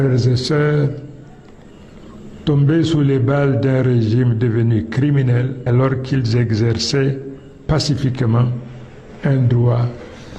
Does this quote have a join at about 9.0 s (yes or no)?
no